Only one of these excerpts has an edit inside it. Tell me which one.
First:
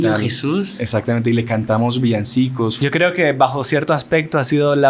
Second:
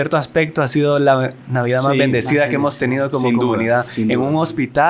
first; 1 cut; at 2.7 s

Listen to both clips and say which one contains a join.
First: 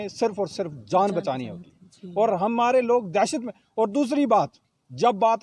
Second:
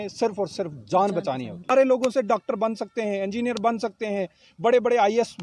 second; 1 cut; at 1.7 s

